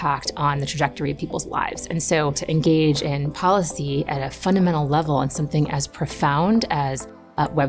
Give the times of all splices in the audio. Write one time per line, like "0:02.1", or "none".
0:02.4